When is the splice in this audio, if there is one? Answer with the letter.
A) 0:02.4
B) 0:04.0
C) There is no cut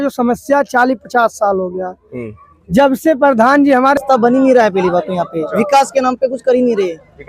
B